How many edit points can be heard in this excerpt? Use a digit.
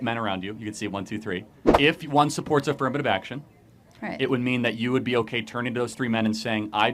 1